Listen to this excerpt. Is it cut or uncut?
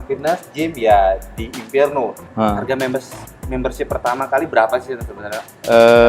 cut